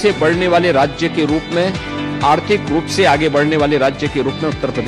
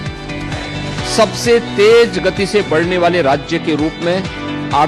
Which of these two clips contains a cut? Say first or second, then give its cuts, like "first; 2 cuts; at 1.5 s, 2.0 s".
second; 1 cut; at 0.9 s